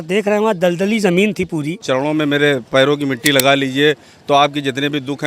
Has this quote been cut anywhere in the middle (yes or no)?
yes